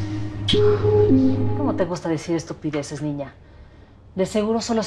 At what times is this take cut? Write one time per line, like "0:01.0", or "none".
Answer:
0:01.5

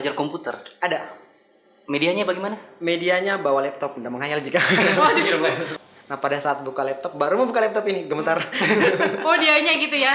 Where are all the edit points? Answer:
0:05.7

